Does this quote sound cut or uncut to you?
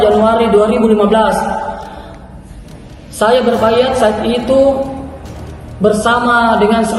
uncut